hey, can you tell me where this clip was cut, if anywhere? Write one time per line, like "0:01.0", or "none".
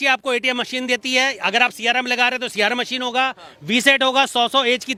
none